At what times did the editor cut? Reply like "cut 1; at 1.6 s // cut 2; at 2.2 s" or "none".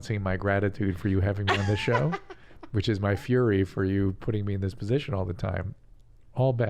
cut 1; at 5.7 s